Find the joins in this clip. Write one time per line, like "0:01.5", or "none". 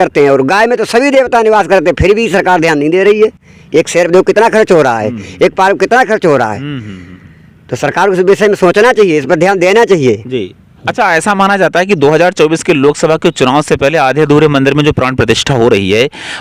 none